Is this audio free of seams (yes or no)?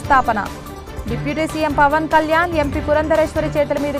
yes